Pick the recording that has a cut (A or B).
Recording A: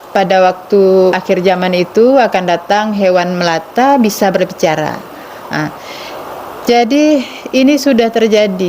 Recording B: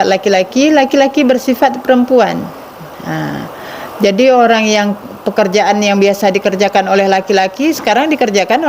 A